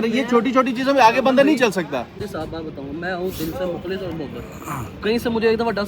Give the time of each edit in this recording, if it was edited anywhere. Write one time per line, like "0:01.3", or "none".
0:02.1